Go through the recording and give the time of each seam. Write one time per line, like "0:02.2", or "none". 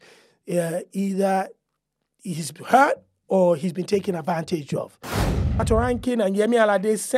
0:05.4